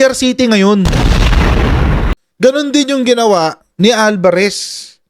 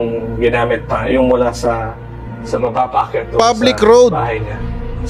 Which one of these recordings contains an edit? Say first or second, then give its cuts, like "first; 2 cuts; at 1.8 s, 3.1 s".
first; 2 cuts; at 2.4 s, 3.6 s